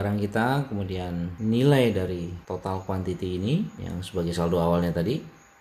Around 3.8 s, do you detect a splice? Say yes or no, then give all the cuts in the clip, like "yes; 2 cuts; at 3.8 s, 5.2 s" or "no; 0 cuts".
yes; 3 cuts; at 1.3 s, 2.4 s, 3.8 s